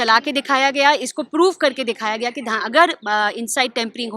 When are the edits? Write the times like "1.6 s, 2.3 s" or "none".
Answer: none